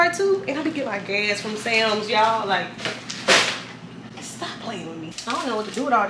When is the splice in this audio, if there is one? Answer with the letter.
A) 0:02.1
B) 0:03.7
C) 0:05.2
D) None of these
C